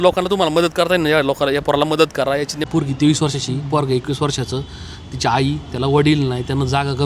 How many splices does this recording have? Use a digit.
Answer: 1